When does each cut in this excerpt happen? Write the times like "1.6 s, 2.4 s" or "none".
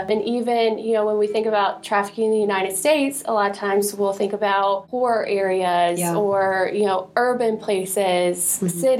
none

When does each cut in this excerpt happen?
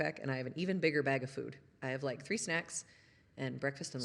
none

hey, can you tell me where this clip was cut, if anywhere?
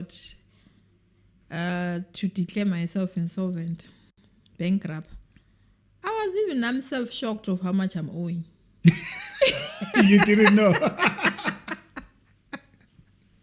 none

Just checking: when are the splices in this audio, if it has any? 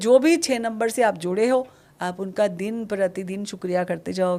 none

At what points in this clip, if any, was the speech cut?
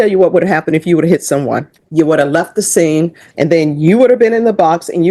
1.8 s, 3.2 s

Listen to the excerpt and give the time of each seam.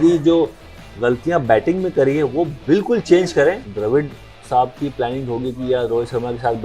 3.7 s

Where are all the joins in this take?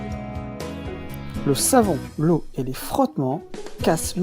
1.4 s

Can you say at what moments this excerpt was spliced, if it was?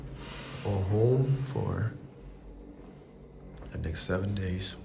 none

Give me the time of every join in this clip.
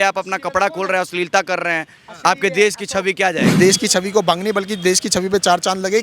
3.5 s

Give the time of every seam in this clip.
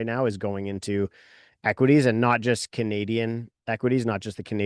none

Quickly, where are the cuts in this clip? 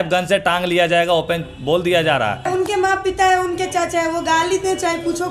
2.5 s

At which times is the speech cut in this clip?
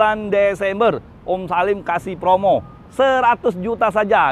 none

